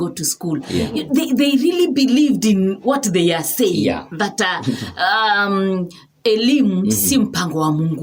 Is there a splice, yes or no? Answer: no